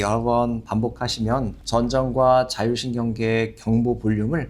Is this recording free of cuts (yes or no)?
no